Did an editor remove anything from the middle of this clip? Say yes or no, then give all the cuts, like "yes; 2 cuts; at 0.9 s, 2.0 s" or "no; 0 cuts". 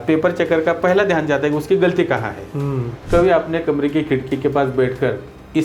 yes; 1 cut; at 2.9 s